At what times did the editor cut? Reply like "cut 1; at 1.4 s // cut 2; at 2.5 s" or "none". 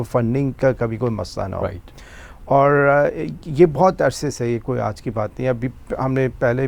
none